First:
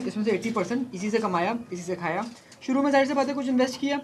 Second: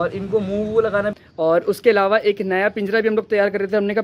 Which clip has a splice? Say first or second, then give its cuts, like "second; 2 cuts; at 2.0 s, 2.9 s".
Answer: second; 1 cut; at 1.2 s